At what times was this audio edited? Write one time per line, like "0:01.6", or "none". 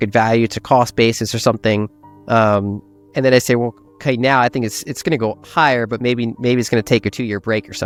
none